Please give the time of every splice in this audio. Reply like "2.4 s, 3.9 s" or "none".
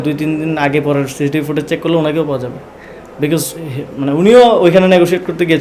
none